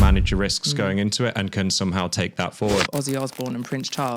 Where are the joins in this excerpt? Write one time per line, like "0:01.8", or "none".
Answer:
0:02.9

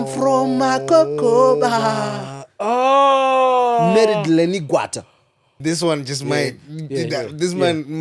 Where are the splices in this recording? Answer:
0:05.5

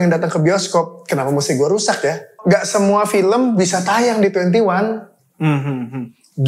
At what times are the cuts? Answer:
0:02.3

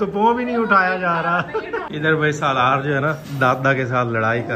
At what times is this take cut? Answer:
0:01.9

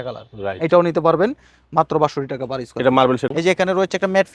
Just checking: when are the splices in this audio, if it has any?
0:03.2

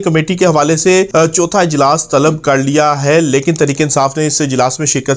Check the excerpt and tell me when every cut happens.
0:01.1

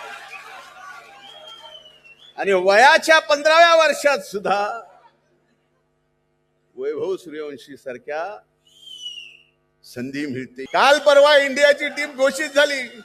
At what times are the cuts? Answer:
0:10.7

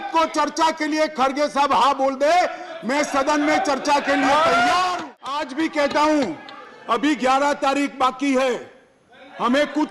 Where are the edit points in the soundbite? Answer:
0:05.0

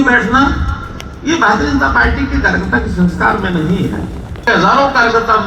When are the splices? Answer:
0:04.5

